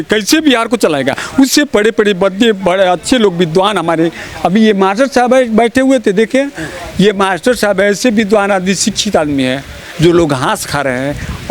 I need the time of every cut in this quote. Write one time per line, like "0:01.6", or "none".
none